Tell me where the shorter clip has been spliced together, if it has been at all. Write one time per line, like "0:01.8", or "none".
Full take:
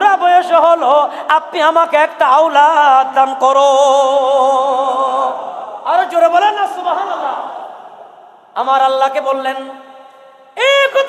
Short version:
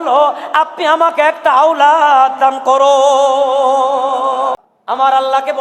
0:04.7